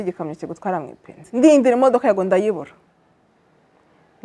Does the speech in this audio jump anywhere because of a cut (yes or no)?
yes